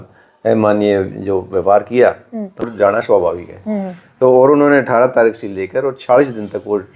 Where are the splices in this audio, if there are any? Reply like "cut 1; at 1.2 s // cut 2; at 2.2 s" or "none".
cut 1; at 2.6 s